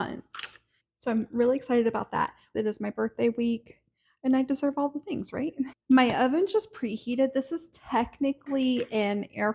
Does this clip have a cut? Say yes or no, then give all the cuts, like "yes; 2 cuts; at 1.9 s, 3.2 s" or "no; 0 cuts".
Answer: yes; 2 cuts; at 2.4 s, 5.8 s